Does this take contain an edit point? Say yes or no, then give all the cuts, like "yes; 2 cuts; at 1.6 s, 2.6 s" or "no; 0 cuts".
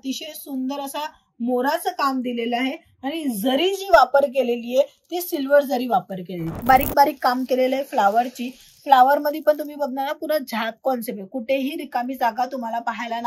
yes; 1 cut; at 6.5 s